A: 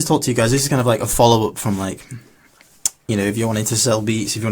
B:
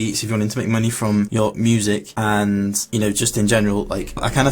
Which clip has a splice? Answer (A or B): B